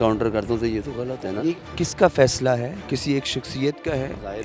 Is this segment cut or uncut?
uncut